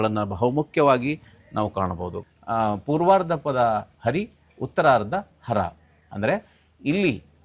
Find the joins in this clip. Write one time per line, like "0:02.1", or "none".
0:02.2